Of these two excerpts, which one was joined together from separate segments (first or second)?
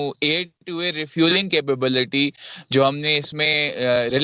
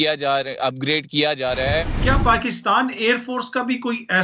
second